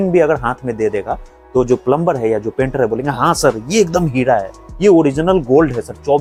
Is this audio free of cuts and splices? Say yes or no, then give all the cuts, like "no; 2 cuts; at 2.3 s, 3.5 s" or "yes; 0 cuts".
yes; 0 cuts